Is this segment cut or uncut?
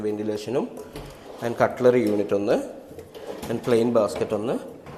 uncut